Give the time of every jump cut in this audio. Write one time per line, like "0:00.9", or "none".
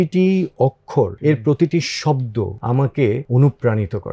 0:01.1
0:02.6
0:03.2